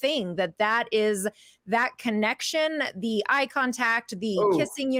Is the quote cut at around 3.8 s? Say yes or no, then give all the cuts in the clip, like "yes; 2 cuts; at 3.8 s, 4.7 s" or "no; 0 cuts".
no; 0 cuts